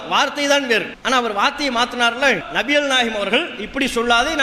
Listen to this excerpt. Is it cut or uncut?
cut